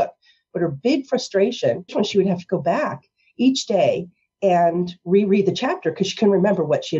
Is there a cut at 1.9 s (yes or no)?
yes